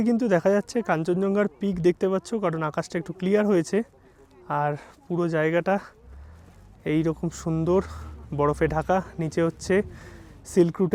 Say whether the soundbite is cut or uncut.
uncut